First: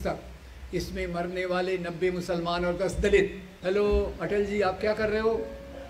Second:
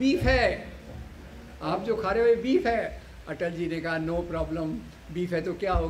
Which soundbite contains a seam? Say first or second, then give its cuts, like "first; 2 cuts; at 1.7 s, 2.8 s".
first; 1 cut; at 3.5 s